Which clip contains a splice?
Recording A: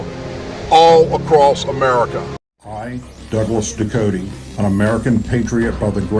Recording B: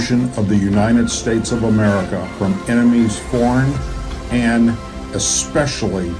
A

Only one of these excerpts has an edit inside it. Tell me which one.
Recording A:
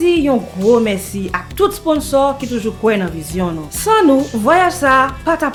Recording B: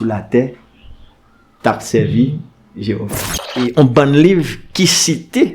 B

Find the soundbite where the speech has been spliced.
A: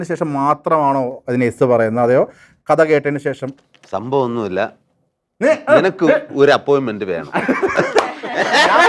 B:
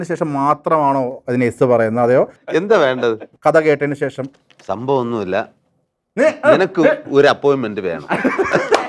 B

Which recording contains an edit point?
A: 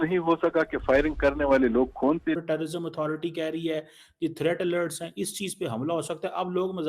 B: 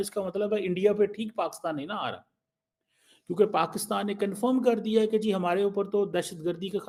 A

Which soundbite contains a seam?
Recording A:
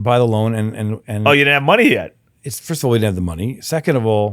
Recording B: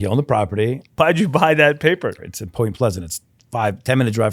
B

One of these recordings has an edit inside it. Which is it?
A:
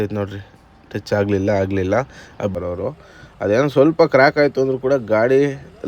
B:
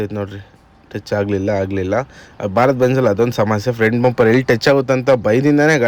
A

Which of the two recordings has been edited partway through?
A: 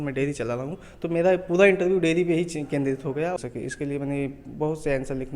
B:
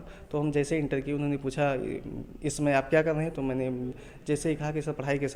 A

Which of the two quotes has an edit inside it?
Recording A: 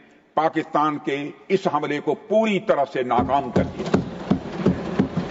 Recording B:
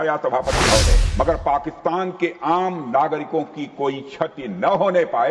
B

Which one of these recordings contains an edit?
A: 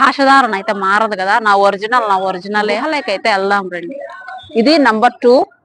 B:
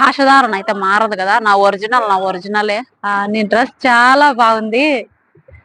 B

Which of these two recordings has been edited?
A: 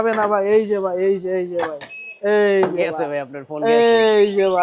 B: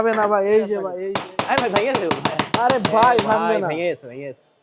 B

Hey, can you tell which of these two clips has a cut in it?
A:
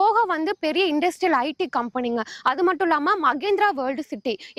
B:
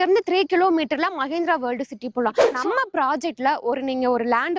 B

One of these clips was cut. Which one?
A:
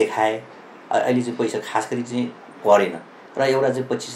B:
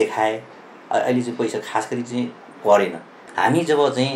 B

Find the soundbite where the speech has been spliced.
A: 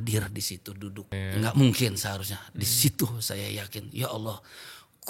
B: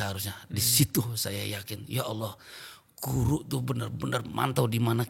A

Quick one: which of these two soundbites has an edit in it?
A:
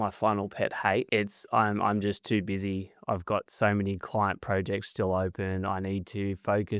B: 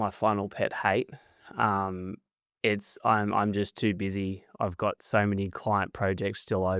A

